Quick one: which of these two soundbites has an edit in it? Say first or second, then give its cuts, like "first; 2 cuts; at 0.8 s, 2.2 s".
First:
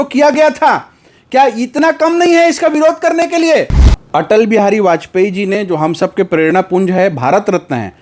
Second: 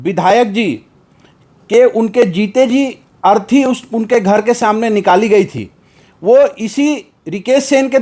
first; 1 cut; at 3.8 s